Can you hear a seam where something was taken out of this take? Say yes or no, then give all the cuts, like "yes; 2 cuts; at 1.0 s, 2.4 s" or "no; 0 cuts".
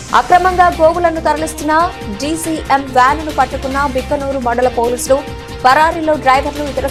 no; 0 cuts